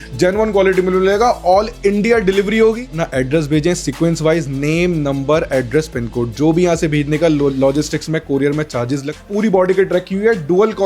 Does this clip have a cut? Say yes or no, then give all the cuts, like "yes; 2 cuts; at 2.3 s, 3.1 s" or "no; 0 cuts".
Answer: yes; 2 cuts; at 3.0 s, 9.2 s